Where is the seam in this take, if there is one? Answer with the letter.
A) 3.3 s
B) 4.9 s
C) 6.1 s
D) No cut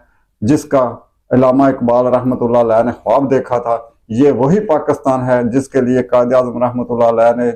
D